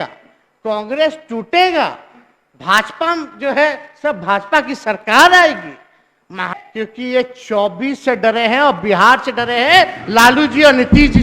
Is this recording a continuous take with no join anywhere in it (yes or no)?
no